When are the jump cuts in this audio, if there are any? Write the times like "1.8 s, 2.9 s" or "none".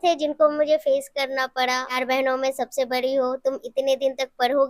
2.0 s